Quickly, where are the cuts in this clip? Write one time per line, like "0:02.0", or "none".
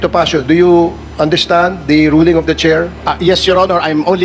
0:03.0